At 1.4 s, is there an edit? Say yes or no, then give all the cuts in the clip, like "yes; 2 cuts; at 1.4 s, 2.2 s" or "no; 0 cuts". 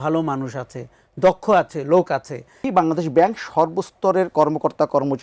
no; 1 cut; at 2.7 s